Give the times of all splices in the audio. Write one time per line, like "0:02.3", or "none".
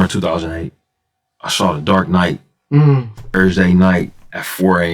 0:03.3